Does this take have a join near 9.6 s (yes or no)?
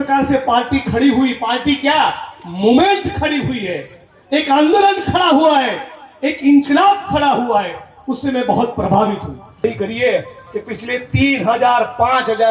yes